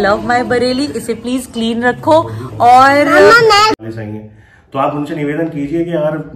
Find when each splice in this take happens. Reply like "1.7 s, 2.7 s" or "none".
3.8 s